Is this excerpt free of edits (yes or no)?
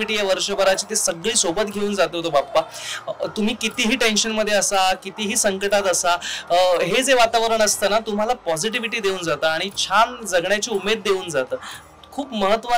yes